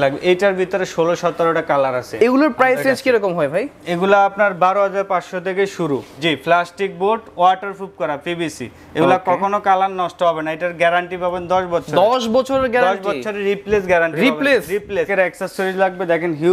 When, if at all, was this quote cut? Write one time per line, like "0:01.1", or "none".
0:06.1
0:15.1